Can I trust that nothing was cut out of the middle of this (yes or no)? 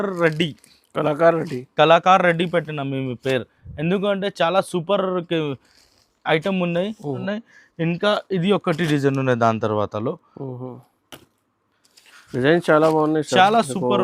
no